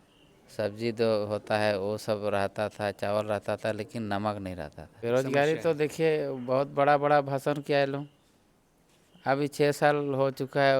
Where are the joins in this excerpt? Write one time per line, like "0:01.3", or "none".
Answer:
0:04.8

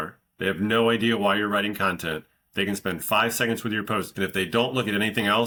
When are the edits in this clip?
none

